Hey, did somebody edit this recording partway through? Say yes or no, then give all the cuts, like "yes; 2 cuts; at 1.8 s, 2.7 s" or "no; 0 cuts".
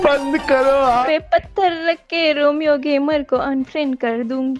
yes; 1 cut; at 1.1 s